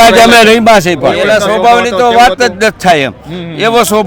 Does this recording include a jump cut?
yes; 1 cut; at 1.2 s

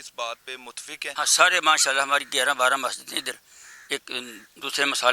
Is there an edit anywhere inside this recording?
yes; 1 cut; at 1.1 s

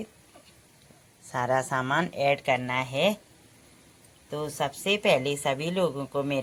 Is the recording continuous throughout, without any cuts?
yes; 0 cuts

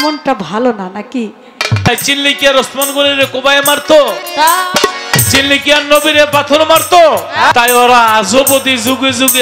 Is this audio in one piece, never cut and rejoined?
no; 2 cuts; at 1.9 s, 7.5 s

